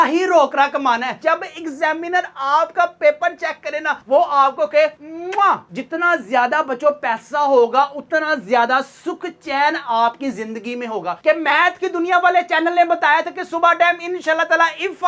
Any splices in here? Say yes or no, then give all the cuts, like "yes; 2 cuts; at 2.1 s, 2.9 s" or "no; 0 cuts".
yes; 3 cuts; at 1.2 s, 5.7 s, 11.2 s